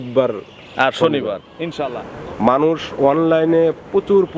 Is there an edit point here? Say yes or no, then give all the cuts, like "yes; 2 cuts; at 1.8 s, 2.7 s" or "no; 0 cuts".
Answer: yes; 1 cut; at 2.0 s